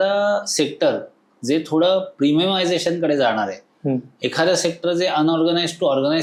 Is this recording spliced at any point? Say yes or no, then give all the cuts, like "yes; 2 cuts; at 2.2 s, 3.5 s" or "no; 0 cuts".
no; 0 cuts